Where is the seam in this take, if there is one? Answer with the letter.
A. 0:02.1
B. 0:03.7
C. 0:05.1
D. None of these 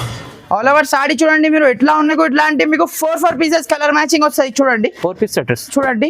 A